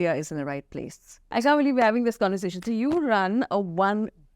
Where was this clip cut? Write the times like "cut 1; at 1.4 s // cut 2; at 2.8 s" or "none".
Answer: cut 1; at 1.3 s